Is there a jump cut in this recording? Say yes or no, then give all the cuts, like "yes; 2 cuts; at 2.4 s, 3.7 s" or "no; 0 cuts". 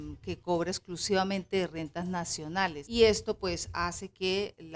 yes; 1 cut; at 2.8 s